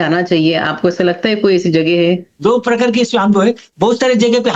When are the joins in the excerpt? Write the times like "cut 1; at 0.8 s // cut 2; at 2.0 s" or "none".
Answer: cut 1; at 2.3 s